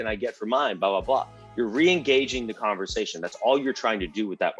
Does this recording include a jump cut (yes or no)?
no